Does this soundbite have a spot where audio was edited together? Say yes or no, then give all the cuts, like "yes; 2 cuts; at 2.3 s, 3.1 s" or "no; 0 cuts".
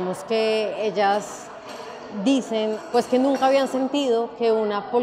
yes; 1 cut; at 2.8 s